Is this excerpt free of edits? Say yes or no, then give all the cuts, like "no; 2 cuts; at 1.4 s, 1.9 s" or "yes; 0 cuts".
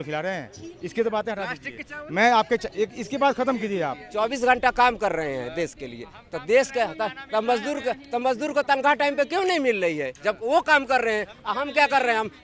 no; 1 cut; at 4.0 s